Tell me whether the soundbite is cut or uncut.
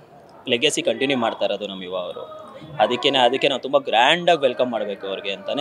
uncut